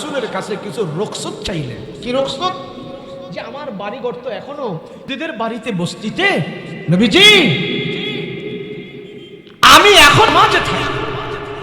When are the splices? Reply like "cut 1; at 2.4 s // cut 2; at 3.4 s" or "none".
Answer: cut 1; at 5.1 s